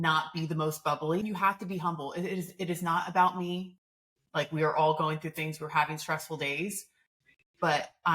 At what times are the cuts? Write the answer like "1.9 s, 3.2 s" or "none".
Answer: 1.2 s